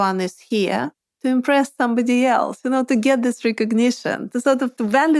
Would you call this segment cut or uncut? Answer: cut